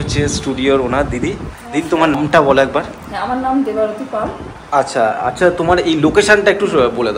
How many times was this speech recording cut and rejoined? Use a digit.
1